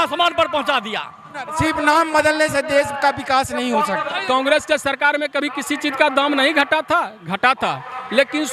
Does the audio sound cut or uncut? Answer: cut